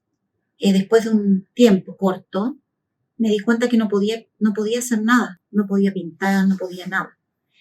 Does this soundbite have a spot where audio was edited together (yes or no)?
no